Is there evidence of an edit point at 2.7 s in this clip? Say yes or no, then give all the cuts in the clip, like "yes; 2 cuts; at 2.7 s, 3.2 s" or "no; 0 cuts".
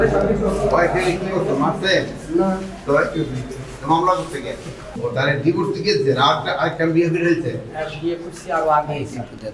no; 1 cut; at 4.9 s